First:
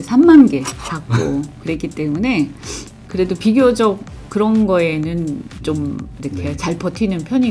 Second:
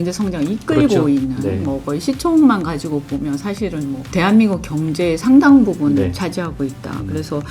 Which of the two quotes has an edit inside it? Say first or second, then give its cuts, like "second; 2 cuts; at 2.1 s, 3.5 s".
second; 1 cut; at 4.0 s